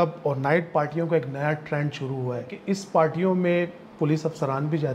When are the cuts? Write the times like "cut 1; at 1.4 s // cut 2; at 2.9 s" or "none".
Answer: cut 1; at 2.6 s